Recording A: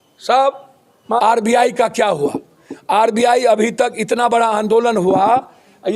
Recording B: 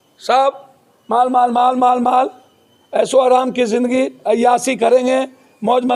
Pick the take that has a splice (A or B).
A